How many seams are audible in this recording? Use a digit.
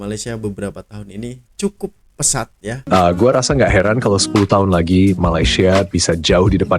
1